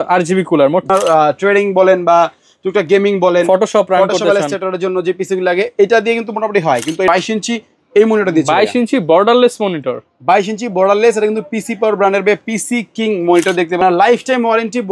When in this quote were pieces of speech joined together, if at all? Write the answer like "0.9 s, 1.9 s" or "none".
0.9 s, 7.1 s, 13.8 s